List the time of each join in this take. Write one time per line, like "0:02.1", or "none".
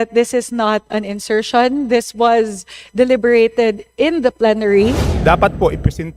0:05.1